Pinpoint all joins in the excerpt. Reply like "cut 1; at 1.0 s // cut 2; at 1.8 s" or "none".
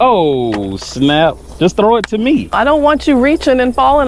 cut 1; at 1.5 s // cut 2; at 2.5 s